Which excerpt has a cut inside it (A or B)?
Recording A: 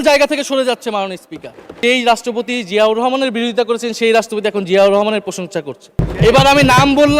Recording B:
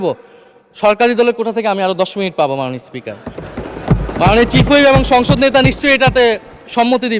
A